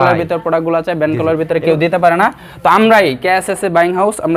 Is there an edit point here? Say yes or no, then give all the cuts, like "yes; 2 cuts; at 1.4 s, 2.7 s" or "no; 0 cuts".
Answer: no; 0 cuts